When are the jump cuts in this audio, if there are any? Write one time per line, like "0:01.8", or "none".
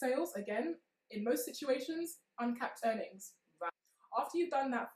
0:03.6